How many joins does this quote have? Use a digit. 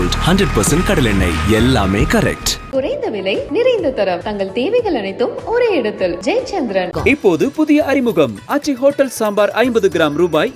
0